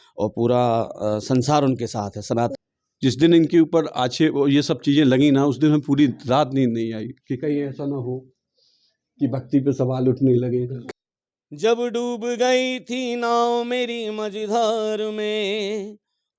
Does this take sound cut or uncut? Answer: cut